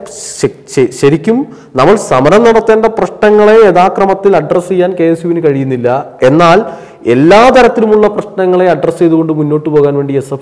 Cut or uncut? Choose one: uncut